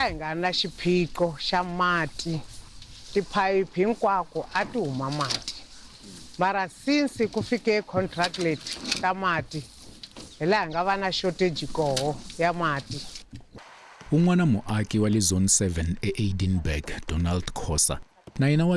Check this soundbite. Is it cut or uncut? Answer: uncut